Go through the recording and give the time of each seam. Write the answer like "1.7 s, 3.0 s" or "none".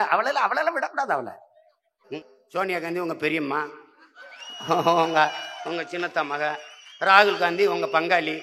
2.1 s